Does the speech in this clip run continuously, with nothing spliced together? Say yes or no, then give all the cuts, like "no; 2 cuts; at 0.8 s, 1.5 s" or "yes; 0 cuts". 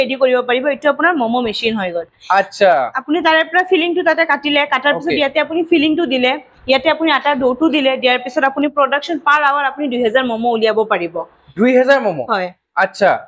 yes; 0 cuts